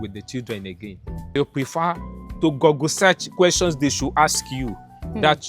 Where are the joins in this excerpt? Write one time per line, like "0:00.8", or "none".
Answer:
0:01.4